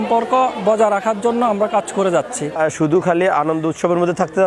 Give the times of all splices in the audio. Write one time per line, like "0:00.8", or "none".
0:02.6

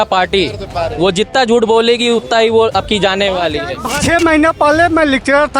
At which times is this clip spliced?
0:03.9

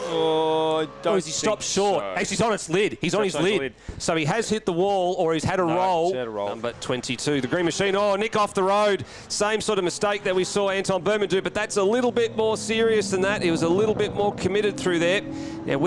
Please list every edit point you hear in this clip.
0:06.7

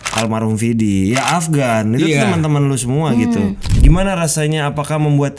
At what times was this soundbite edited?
none

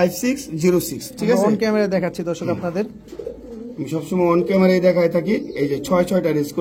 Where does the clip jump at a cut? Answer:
none

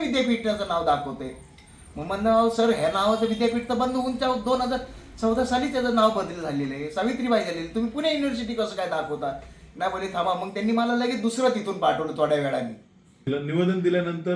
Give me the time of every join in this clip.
0:13.3

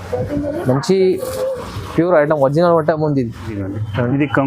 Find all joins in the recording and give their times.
0:03.5

